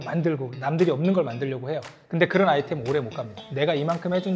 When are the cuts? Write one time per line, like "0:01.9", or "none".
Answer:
0:03.4